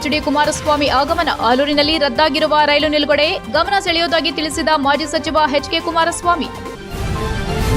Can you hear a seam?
yes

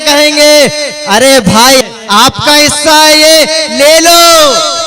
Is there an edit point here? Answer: yes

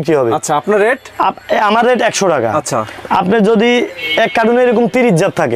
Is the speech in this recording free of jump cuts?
yes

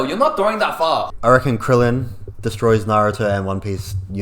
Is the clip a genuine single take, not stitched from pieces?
no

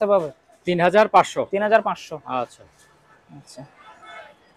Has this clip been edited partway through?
no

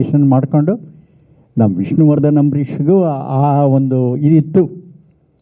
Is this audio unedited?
yes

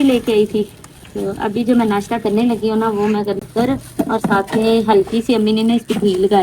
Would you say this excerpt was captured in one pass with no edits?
no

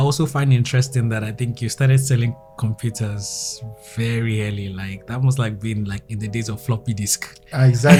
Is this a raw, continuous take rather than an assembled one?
yes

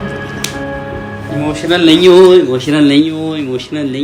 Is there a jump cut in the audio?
no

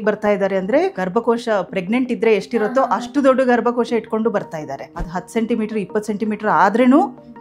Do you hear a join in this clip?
yes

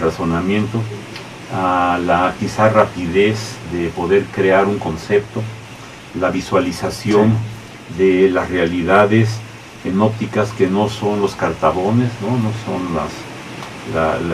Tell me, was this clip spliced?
no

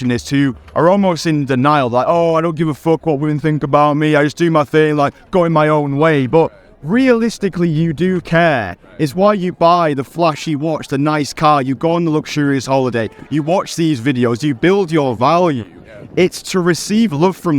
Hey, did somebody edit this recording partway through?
no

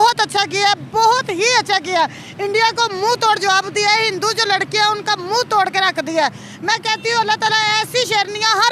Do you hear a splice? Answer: no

